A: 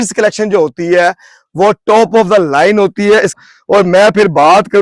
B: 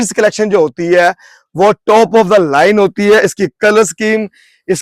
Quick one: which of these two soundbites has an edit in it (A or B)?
A